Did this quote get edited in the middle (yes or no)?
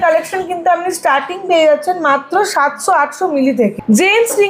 no